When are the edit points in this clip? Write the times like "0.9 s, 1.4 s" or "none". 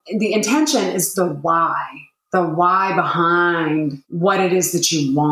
4.0 s